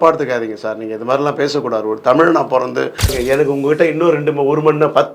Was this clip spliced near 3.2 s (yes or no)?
yes